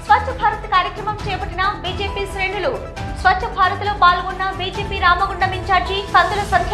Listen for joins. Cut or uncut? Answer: uncut